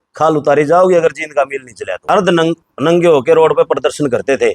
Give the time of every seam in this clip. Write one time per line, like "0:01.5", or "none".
0:02.0